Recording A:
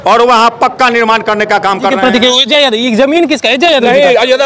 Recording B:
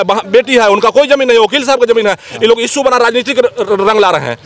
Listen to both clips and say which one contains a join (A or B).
A